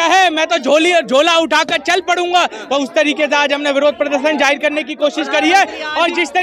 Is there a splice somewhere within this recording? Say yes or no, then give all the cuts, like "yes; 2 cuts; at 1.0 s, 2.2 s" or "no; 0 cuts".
no; 0 cuts